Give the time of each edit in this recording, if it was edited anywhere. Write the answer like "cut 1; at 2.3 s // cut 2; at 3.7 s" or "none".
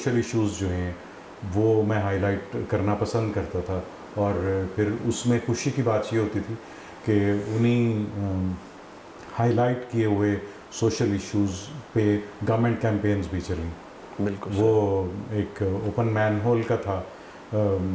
none

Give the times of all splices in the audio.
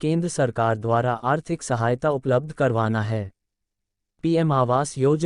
cut 1; at 4.0 s

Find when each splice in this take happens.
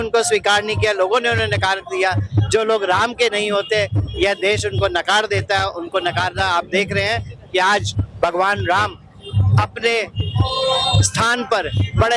none

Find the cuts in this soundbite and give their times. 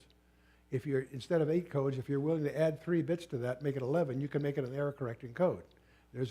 none

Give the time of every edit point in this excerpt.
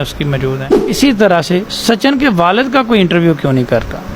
cut 1; at 1.0 s

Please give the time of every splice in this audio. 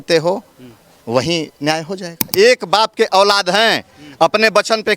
cut 1; at 2.3 s

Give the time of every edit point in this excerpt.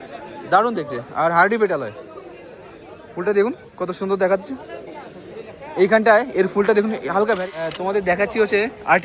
cut 1; at 7.4 s

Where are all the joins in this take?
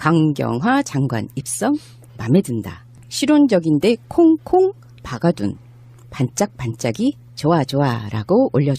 none

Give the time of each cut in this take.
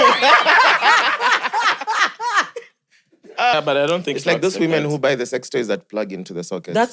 cut 1; at 3.5 s

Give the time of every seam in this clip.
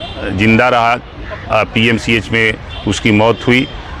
none

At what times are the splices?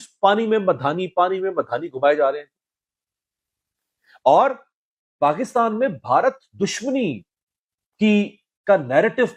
none

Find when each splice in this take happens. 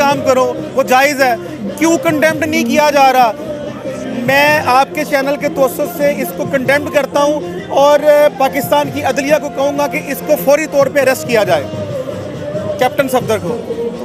none

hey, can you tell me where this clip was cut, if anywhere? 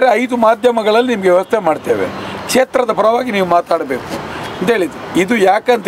none

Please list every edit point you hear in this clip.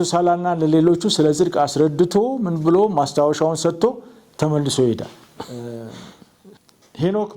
cut 1; at 5.5 s

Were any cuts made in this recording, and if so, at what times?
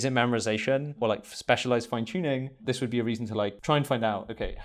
cut 1; at 1.0 s // cut 2; at 2.6 s // cut 3; at 3.6 s

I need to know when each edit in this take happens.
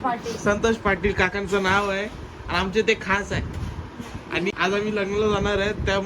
cut 1; at 4.5 s

